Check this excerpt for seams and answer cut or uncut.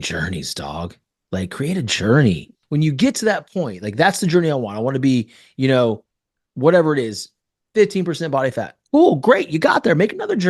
cut